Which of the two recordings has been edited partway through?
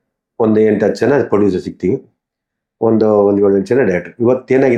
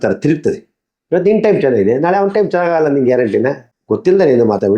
second; 1 cut; at 3.7 s

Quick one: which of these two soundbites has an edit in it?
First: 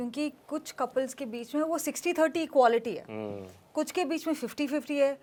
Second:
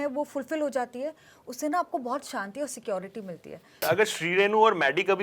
second; 1 cut; at 3.8 s

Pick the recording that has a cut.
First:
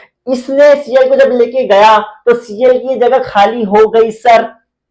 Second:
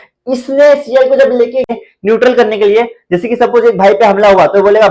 second; 1 cut; at 1.7 s

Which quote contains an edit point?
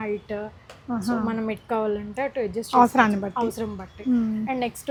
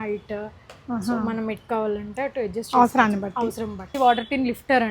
second; 1 cut; at 3.9 s

